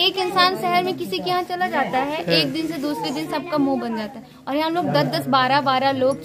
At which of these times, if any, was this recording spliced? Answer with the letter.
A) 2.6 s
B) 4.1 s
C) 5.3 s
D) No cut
D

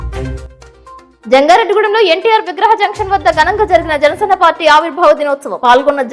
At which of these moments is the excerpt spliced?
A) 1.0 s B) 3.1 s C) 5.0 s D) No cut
A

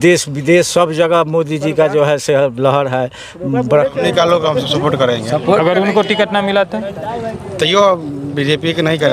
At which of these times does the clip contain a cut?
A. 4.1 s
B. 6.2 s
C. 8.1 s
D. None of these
A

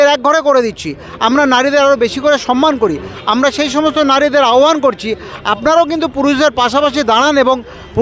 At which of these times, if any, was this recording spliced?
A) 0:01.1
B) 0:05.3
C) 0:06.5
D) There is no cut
D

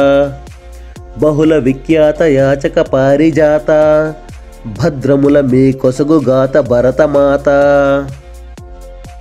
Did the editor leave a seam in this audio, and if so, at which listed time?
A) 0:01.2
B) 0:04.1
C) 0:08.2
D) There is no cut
C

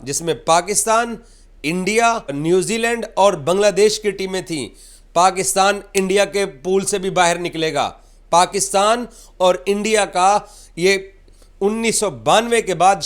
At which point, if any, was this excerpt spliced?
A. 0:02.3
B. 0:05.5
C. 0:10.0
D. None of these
A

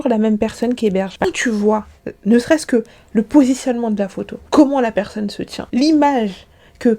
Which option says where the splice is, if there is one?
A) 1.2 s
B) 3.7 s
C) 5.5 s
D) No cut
A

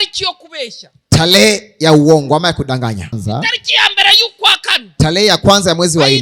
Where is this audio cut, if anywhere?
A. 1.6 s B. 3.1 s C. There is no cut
B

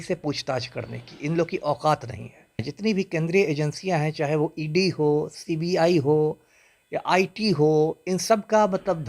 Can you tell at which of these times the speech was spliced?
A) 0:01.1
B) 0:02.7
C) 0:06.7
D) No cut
B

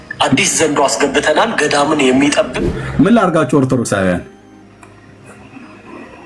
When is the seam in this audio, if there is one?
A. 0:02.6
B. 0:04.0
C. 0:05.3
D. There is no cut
A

